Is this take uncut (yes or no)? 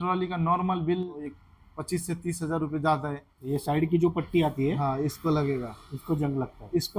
no